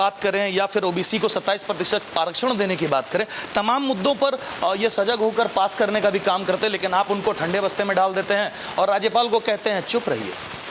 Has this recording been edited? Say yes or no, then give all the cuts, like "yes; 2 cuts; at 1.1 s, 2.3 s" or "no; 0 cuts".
no; 0 cuts